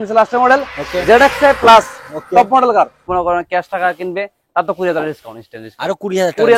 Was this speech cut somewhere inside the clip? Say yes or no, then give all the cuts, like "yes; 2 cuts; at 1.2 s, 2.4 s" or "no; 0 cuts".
yes; 1 cut; at 3.0 s